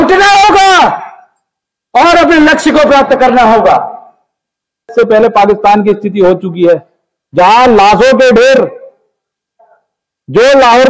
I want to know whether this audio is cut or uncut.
cut